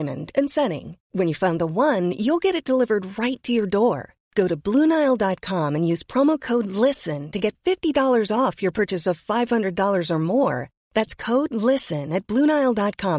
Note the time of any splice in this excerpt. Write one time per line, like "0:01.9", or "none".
none